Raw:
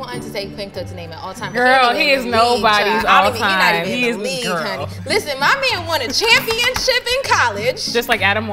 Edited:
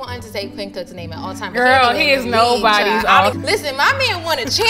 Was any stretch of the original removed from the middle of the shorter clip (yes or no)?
yes